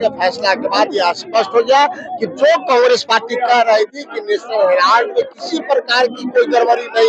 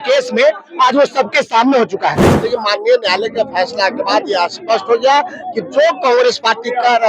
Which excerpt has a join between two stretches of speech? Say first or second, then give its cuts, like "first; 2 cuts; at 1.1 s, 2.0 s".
second; 1 cut; at 2.3 s